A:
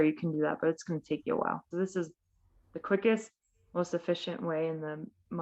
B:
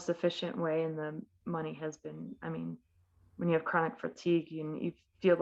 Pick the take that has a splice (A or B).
A